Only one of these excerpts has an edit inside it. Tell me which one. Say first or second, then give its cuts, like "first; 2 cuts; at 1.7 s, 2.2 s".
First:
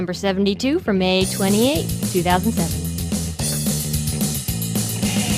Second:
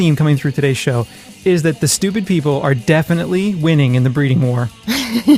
second; 1 cut; at 3.2 s